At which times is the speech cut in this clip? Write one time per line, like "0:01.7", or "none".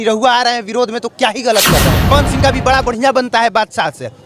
0:02.1